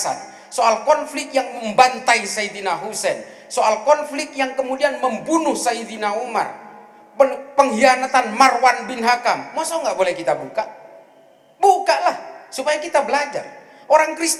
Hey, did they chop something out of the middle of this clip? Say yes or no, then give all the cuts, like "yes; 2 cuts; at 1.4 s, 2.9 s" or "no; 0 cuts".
no; 0 cuts